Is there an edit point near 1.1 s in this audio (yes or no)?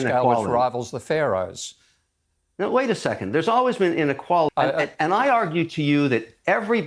no